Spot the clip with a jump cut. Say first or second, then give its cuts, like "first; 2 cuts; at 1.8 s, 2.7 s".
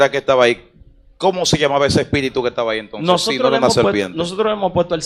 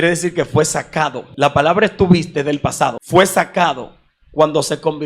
second; 2 cuts; at 1.2 s, 3.0 s